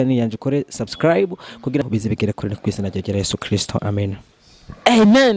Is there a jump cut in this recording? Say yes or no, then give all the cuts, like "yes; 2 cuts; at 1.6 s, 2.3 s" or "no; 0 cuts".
yes; 1 cut; at 1.8 s